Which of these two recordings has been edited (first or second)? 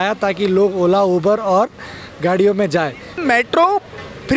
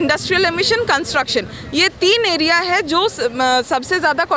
first